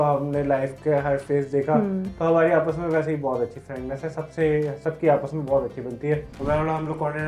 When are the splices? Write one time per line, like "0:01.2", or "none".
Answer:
0:06.3